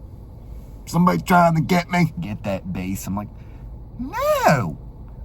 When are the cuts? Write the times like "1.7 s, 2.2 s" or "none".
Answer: 2.2 s

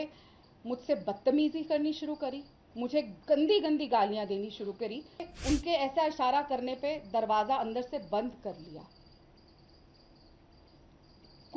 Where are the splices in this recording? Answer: 5.3 s

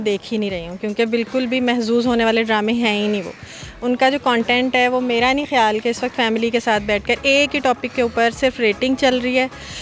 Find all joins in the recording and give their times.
none

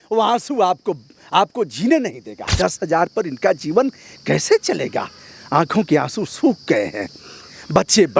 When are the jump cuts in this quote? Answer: 2.5 s

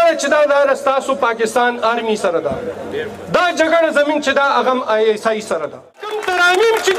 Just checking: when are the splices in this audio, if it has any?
6.1 s

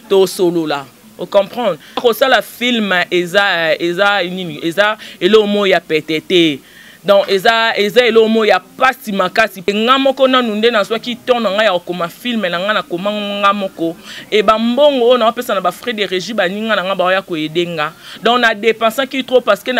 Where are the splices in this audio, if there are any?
2.0 s, 9.7 s

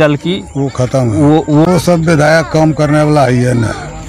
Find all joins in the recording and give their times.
1.6 s

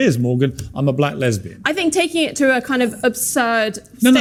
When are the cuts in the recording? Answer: none

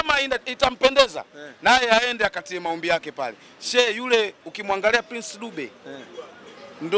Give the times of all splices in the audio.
none

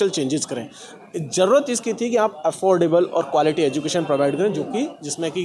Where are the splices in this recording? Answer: none

